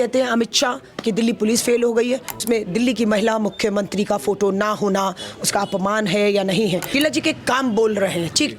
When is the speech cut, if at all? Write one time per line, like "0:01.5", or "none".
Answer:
0:02.4
0:06.9